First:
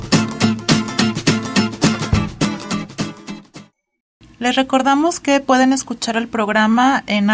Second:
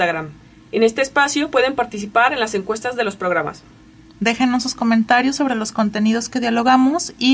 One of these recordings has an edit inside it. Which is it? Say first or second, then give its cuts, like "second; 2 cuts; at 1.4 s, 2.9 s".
first; 1 cut; at 4.2 s